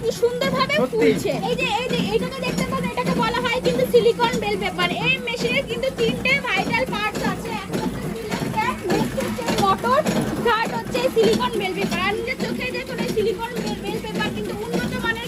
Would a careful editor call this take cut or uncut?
uncut